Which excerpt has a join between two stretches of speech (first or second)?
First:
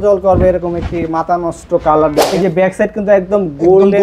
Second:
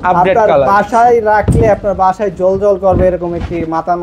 first